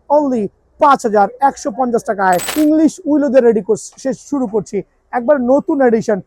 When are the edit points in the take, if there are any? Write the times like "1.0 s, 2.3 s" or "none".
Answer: 2.5 s